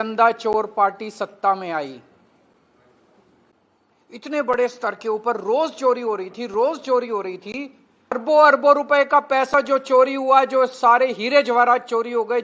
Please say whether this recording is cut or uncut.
cut